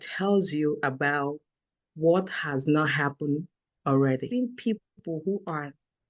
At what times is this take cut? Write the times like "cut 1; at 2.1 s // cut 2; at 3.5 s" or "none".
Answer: cut 1; at 4.3 s